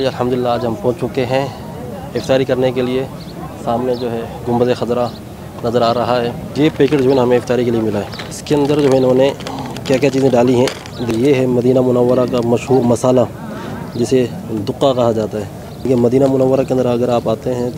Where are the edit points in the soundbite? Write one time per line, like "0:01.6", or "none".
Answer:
0:06.5
0:08.3
0:11.1
0:15.7